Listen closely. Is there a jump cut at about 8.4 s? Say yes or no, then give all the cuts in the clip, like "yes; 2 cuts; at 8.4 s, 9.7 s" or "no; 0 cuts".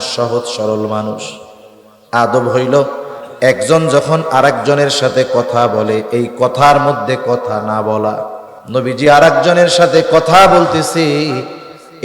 yes; 1 cut; at 8.4 s